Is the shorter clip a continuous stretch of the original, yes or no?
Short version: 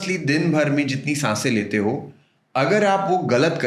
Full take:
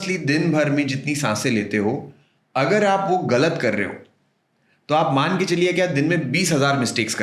yes